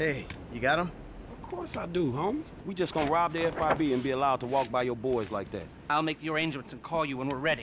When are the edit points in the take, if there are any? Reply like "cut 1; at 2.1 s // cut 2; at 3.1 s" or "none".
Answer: cut 1; at 2.6 s // cut 2; at 5.9 s